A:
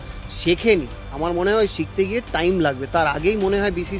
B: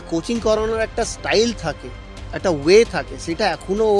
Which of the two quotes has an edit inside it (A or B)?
A